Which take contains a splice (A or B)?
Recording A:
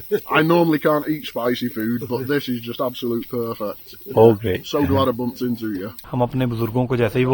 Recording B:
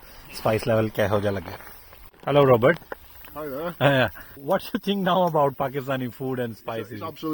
A